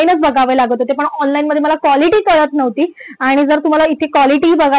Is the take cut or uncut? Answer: uncut